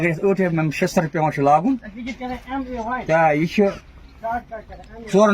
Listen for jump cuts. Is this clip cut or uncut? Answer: uncut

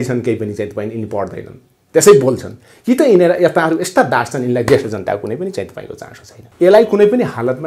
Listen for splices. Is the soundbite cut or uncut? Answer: cut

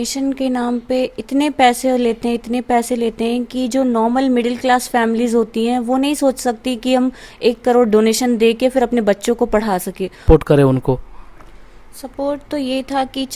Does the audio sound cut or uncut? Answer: cut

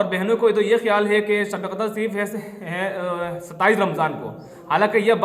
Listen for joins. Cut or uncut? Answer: uncut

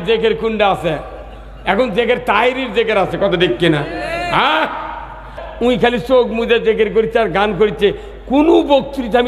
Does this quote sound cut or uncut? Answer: cut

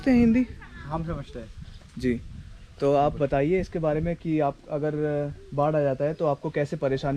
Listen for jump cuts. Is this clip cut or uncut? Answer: uncut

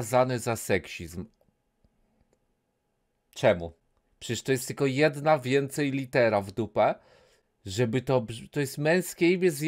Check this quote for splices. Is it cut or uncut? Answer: uncut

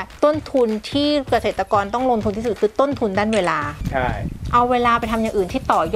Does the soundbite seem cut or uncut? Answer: uncut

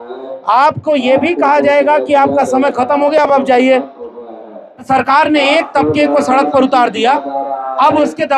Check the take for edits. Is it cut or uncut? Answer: cut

